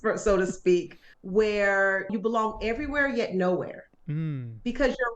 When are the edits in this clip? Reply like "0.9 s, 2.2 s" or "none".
2.1 s